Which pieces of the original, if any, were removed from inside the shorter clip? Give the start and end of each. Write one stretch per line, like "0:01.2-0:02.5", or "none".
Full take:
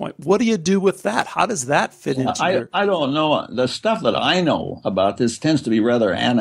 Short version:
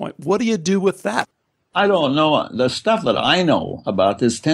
0:01.7-0:02.6

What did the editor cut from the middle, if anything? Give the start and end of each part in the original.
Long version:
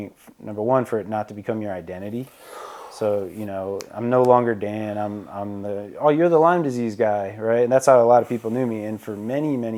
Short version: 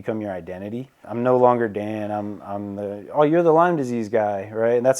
0:02.4-0:03.9

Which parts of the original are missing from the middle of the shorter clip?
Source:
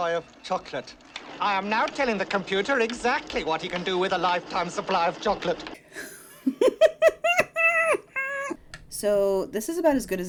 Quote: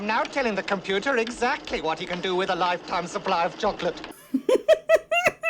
0:05.7-0:06.2

